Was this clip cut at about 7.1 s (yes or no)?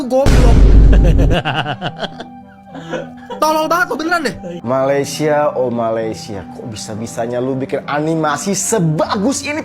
no